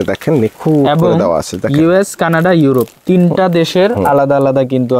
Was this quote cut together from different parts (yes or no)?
no